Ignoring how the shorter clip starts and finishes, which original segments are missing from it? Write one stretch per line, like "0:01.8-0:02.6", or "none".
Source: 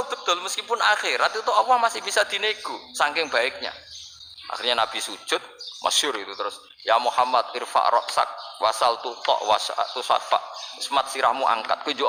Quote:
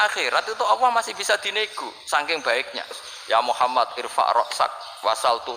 0:04.0-0:06.7